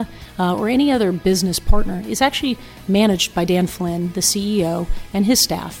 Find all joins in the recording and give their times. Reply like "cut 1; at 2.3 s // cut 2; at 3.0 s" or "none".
none